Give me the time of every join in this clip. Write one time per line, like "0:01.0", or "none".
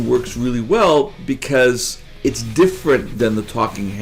0:02.1
0:03.1